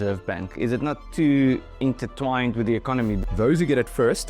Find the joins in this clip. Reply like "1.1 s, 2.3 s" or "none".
3.2 s